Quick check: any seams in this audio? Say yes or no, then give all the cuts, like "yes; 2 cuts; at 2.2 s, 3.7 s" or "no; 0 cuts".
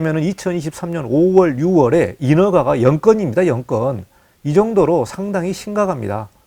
no; 0 cuts